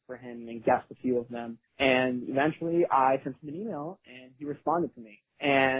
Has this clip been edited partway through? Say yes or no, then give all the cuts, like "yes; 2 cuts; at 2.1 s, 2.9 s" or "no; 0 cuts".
no; 0 cuts